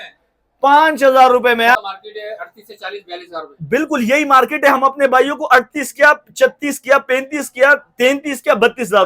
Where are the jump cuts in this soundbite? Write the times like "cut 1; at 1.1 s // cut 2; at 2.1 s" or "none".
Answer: cut 1; at 1.8 s